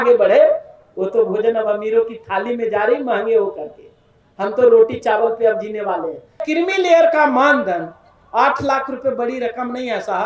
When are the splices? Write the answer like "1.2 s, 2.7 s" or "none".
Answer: 6.4 s